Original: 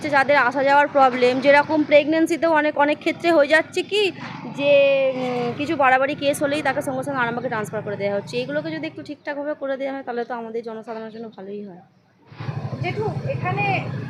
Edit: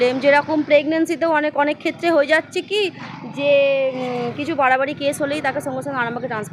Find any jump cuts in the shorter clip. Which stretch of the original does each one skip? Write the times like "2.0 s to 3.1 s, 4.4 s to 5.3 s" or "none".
none